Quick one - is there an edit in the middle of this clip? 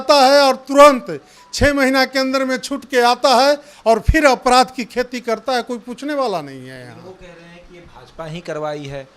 no; 0 cuts

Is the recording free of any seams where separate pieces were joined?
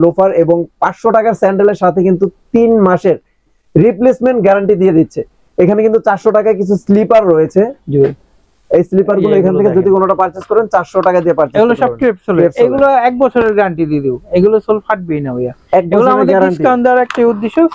yes; 0 cuts

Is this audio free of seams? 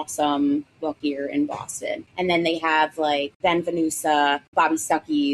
no; 4 cuts; at 1.0 s, 2.1 s, 3.3 s, 4.4 s

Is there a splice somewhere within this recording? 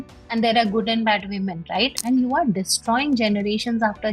yes; 1 cut; at 2.0 s

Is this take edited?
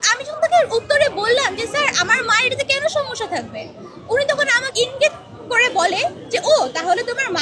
yes; 1 cut; at 4.7 s

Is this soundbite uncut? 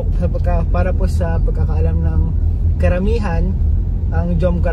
yes; 0 cuts

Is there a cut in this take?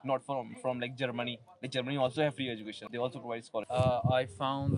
yes; 2 cuts; at 2.7 s, 3.7 s

